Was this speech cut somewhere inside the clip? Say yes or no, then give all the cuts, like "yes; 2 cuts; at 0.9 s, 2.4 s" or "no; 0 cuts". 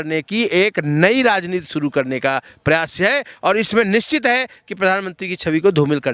no; 0 cuts